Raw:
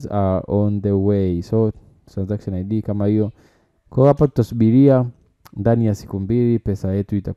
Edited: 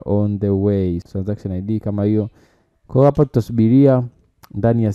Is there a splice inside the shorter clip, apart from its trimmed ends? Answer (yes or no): yes